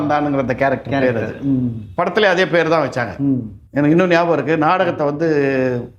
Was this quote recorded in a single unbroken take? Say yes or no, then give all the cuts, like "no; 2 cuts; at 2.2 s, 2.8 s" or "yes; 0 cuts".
no; 1 cut; at 3.6 s